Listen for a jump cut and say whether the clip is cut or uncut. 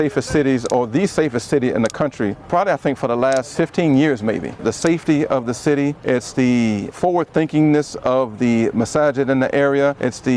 uncut